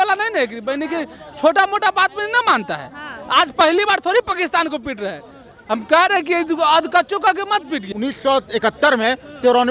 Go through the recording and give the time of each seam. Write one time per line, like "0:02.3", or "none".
0:07.9